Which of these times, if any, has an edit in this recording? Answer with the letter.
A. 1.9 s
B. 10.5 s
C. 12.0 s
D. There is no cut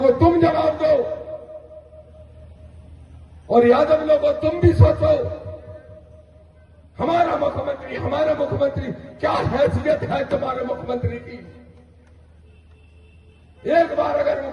D